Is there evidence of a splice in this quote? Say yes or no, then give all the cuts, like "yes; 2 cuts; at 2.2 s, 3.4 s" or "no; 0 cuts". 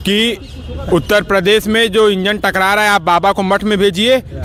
no; 0 cuts